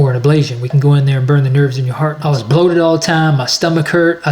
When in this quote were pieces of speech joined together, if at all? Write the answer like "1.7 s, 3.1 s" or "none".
2.2 s